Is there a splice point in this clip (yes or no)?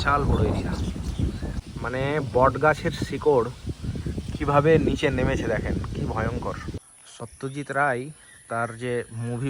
yes